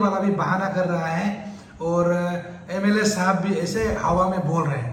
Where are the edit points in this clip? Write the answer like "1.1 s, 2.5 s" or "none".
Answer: none